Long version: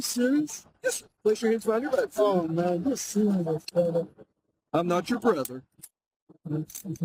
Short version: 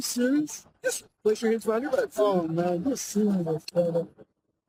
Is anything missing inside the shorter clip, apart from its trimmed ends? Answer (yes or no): no